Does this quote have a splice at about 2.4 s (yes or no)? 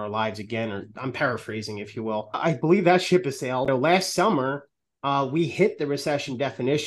yes